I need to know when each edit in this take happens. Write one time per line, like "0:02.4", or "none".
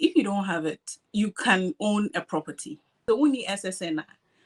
0:02.9

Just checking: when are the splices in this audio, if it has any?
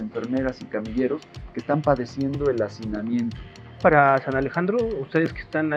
0:03.8

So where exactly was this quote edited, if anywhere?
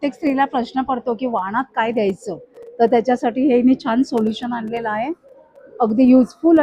none

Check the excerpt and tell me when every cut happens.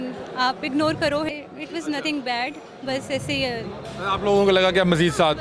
0:01.3

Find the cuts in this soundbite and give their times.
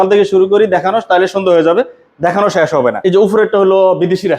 0:03.0

